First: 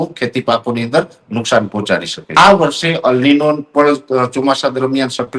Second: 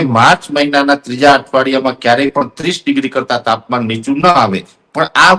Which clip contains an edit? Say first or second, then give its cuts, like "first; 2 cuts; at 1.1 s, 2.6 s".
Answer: first; 1 cut; at 2.4 s